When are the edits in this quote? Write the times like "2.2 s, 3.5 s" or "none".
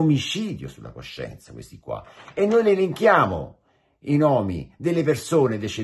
none